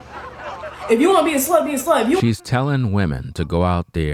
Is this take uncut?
yes; 0 cuts

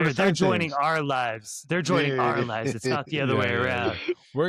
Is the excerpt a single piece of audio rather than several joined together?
yes; 0 cuts

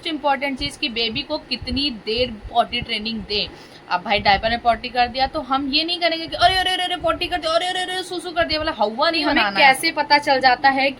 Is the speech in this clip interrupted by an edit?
yes; 2 cuts; at 3.5 s, 9.5 s

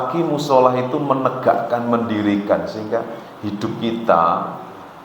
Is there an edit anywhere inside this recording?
no; 0 cuts

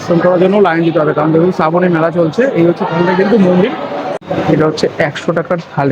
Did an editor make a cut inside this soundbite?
yes; 1 cut; at 4.0 s

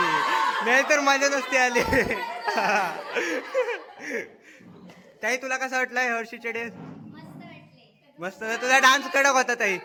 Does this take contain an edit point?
no; 0 cuts

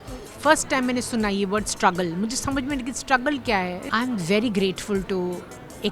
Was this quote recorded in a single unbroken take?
no; 1 cut; at 3.8 s

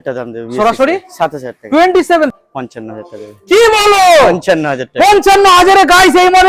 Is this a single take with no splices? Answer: no; 1 cut; at 2.3 s

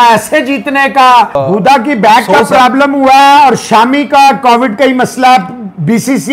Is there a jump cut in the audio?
yes; 1 cut; at 1.3 s

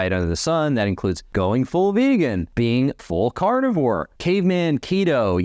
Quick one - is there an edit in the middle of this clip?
yes; 3 cuts; at 1.2 s, 2.9 s, 4.1 s

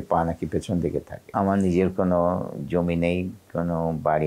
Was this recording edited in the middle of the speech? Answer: yes; 1 cut; at 1.3 s

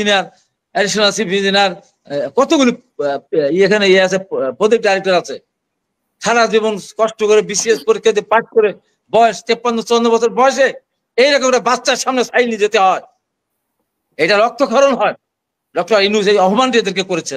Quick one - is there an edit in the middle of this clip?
no; 0 cuts

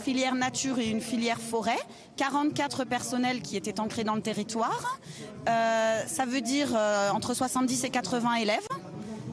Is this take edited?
no; 0 cuts

